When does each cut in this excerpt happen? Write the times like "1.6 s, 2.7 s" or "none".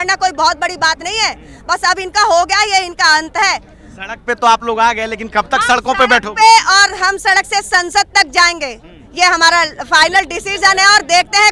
none